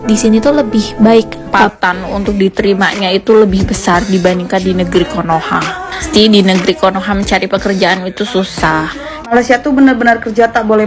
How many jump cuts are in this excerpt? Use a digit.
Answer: 3